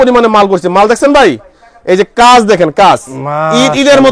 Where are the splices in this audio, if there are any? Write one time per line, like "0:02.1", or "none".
none